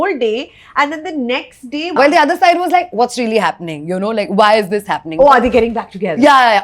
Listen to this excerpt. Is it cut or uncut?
cut